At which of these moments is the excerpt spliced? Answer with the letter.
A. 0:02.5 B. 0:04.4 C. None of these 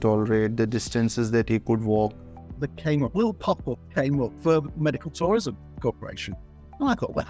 A